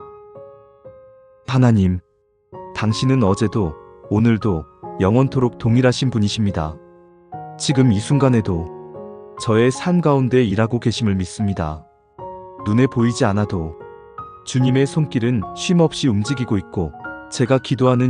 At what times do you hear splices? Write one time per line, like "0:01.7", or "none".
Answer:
0:01.5